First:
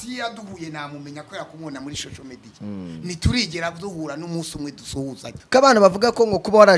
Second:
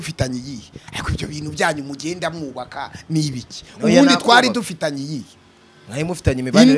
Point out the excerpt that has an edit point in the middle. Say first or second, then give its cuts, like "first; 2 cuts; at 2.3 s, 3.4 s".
first; 1 cut; at 5.3 s